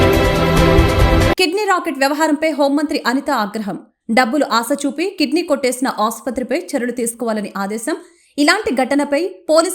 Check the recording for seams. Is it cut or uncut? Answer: cut